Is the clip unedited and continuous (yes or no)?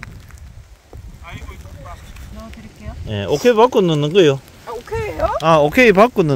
no